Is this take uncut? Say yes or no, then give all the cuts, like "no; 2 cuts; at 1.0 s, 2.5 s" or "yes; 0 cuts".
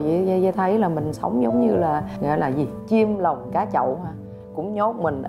yes; 0 cuts